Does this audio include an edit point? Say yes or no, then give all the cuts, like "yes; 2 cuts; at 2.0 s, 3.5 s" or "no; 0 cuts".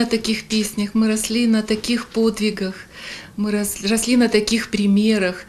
no; 0 cuts